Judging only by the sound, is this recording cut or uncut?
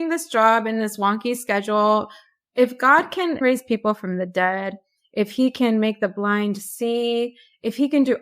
cut